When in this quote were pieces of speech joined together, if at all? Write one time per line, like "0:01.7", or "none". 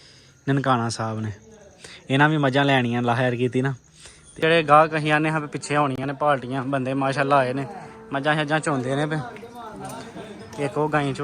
0:04.3